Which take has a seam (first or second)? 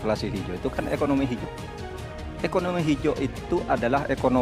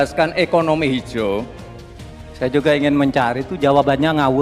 second